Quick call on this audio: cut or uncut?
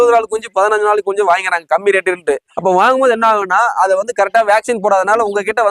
uncut